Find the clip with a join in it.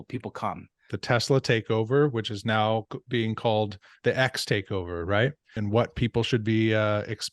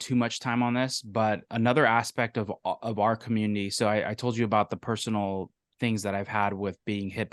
first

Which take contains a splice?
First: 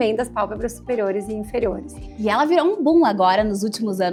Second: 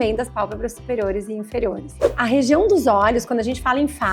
second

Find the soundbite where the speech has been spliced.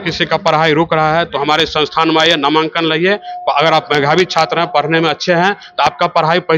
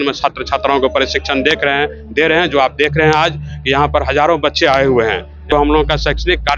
second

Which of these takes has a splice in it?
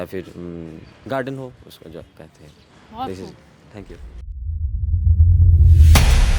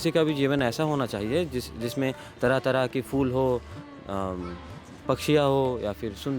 first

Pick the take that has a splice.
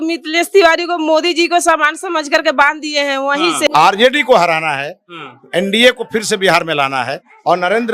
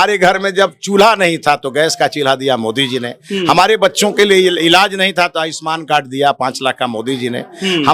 first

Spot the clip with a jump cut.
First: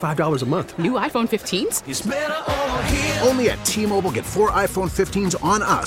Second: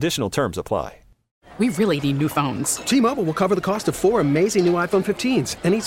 second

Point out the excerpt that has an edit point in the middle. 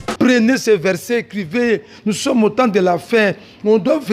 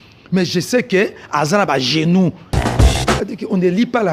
second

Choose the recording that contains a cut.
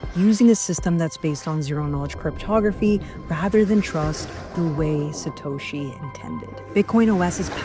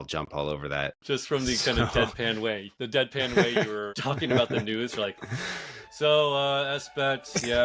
second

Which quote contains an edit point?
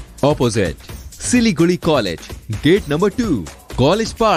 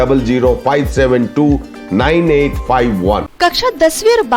second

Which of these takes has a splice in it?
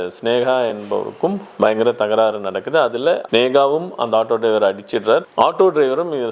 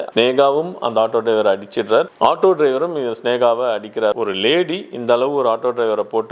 second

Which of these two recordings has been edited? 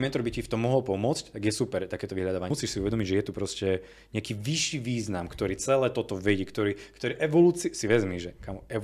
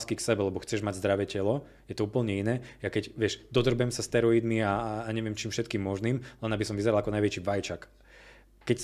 first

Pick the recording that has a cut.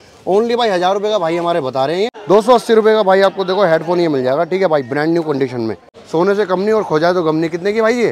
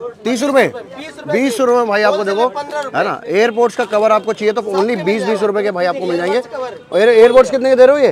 first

